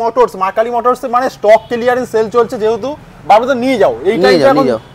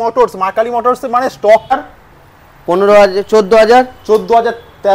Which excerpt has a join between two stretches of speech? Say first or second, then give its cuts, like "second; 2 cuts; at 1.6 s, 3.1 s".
second; 1 cut; at 1.7 s